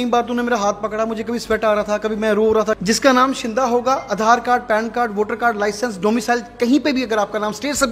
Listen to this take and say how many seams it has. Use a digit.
1